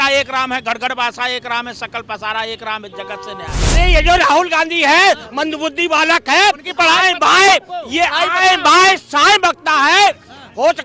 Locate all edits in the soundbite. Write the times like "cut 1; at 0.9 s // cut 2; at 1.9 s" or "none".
cut 1; at 3.7 s